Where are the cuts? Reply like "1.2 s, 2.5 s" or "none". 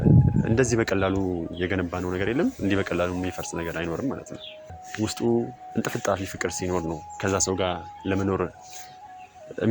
4.8 s